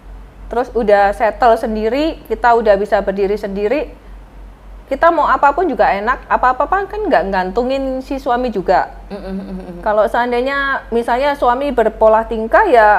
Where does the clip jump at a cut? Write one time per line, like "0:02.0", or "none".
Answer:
none